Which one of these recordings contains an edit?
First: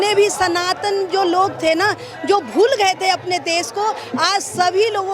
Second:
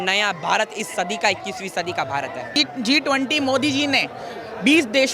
second; 1 cut; at 2.6 s

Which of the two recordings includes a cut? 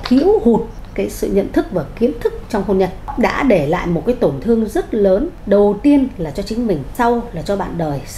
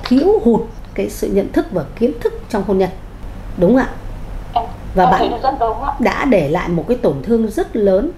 first; 3 cuts; at 3.1 s, 5.3 s, 6.9 s

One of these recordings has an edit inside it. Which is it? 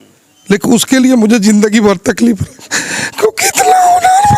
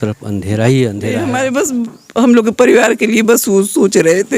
second; 1 cut; at 1.3 s

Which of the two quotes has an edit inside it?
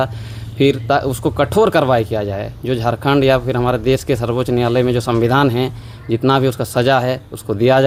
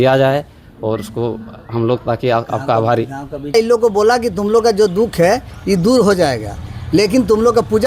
second; 1 cut; at 3.5 s

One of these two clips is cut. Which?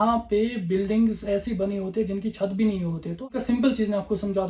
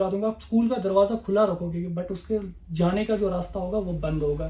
first; 1 cut; at 3.3 s

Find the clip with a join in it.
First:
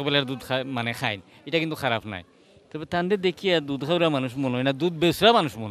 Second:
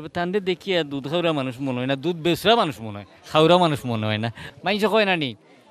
second; 1 cut; at 4.4 s

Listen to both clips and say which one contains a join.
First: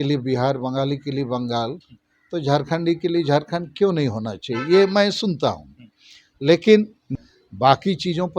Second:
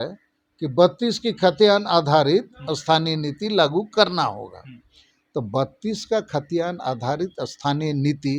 first; 1 cut; at 7.1 s

